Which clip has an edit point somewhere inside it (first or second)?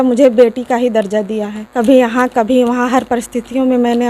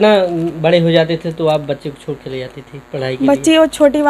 first